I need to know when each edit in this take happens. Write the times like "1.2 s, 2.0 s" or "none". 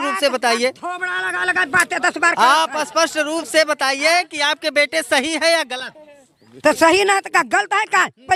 none